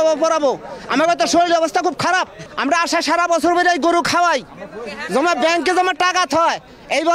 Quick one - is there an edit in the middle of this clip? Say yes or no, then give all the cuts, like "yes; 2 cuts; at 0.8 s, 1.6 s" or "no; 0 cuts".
yes; 1 cut; at 2.4 s